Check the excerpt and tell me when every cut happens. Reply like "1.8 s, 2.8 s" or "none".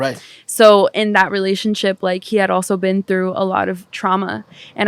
none